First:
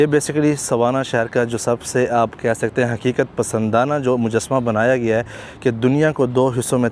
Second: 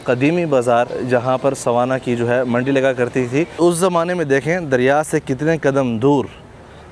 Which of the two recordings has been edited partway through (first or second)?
second